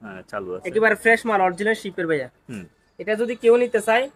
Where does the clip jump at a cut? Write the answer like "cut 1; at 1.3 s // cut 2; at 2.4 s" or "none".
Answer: none